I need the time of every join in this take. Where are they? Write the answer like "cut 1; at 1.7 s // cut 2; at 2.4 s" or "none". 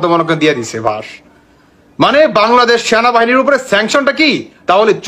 none